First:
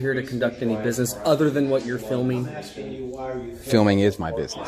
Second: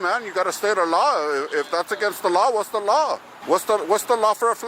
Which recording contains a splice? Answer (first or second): second